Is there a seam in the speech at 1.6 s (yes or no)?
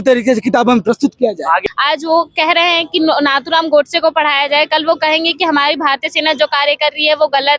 yes